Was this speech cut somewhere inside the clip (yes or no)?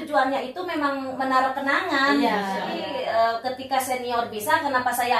yes